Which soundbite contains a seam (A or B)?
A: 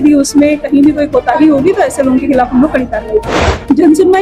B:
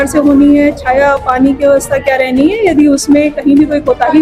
A